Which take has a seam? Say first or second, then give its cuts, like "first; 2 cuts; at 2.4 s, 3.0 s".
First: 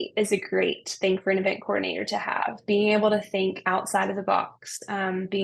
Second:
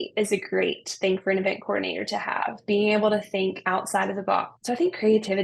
second; 1 cut; at 4.5 s